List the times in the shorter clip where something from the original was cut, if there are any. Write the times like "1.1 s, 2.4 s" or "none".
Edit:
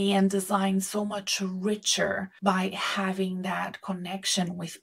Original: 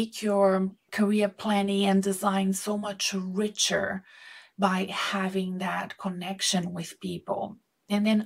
2.3 s

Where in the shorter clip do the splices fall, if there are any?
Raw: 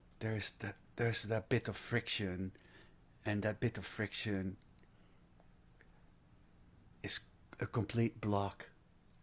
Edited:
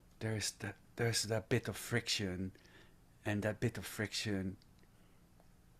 none

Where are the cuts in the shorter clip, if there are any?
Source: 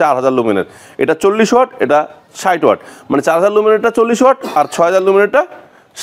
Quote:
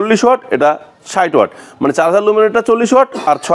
none

